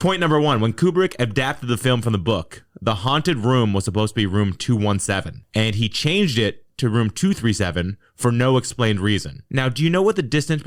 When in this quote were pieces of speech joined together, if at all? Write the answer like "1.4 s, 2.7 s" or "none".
none